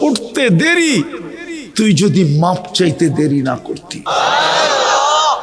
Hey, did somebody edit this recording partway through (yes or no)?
yes